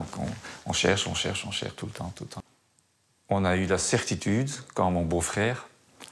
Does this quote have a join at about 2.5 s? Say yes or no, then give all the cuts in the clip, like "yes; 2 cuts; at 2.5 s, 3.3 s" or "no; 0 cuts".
yes; 1 cut; at 2.5 s